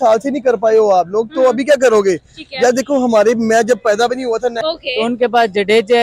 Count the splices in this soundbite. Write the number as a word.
one